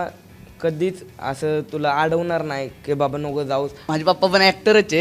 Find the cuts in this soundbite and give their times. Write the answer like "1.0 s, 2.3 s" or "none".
3.8 s